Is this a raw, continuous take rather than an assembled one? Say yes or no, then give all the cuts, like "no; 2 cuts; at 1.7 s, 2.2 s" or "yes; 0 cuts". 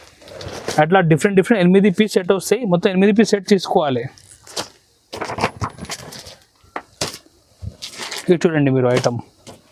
yes; 0 cuts